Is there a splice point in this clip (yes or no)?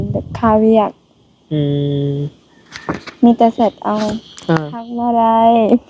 yes